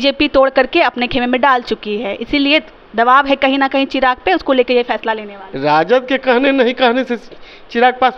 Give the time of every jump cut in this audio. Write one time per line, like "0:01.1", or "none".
0:05.3